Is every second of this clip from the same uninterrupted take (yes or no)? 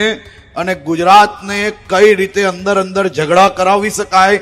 yes